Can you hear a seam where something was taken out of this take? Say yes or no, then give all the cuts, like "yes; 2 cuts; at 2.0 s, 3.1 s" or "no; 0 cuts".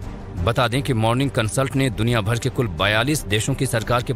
yes; 1 cut; at 1.0 s